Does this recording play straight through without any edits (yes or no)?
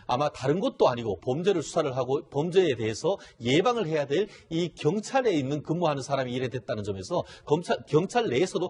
no